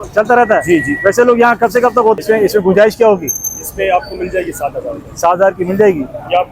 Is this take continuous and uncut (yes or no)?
no